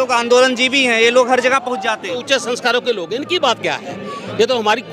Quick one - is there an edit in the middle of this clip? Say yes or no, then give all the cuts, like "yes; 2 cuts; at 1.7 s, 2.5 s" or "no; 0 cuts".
yes; 1 cut; at 2.2 s